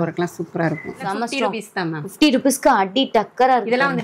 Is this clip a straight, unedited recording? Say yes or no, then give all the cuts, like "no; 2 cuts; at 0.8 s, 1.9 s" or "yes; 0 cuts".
no; 1 cut; at 0.9 s